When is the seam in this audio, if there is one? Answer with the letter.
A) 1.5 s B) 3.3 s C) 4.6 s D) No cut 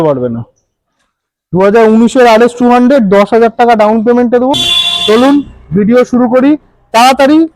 C